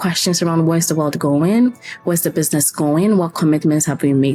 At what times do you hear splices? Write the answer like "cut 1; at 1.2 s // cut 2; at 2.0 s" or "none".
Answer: none